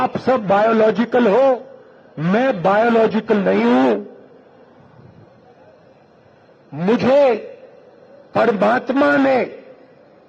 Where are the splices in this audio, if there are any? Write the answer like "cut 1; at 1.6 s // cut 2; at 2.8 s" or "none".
none